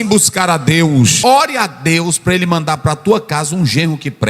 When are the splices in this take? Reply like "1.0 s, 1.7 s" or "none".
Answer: 1.2 s